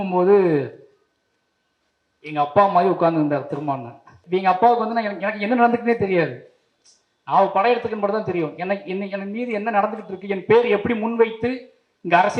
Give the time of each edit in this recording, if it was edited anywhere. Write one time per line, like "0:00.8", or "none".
0:04.1